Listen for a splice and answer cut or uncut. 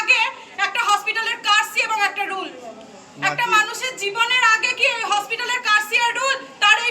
uncut